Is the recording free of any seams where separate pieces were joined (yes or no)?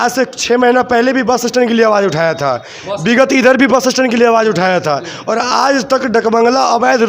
yes